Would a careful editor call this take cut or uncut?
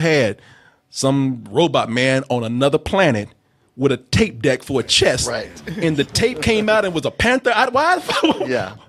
uncut